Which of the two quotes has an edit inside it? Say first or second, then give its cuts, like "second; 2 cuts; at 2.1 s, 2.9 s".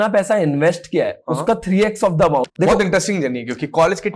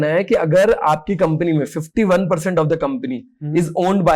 first; 1 cut; at 2.5 s